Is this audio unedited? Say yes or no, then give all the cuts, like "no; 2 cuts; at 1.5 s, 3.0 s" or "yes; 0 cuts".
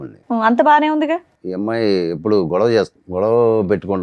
no; 2 cuts; at 1.4 s, 3.0 s